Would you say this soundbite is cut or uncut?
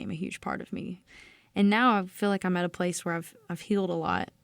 cut